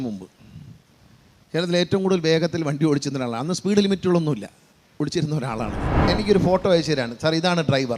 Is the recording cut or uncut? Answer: cut